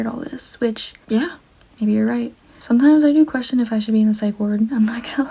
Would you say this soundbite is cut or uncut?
cut